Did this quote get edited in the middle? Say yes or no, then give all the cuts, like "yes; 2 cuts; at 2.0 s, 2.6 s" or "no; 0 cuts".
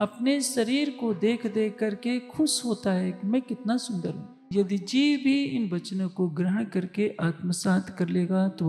yes; 1 cut; at 4.5 s